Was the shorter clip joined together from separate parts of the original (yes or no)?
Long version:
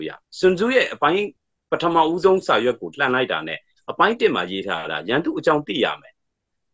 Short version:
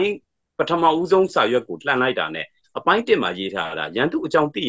no